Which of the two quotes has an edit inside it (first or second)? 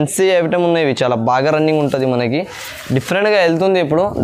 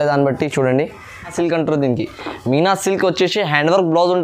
second